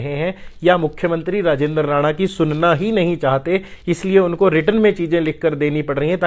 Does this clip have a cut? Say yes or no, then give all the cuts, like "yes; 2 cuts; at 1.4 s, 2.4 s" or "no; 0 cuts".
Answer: no; 0 cuts